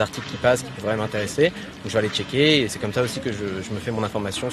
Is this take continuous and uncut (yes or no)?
yes